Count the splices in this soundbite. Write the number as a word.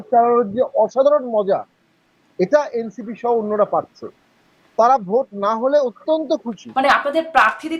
one